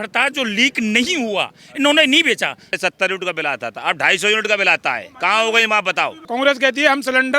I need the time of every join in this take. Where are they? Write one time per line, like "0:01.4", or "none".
0:02.7
0:06.2